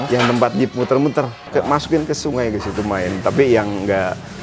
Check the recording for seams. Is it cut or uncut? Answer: cut